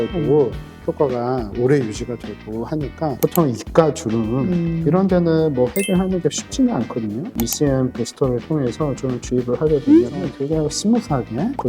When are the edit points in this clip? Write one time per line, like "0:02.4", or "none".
0:03.2